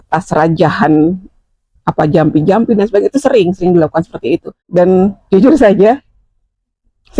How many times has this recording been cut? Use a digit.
1